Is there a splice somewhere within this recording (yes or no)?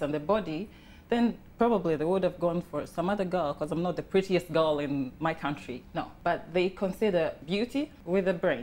yes